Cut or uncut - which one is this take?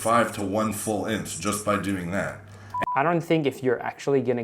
cut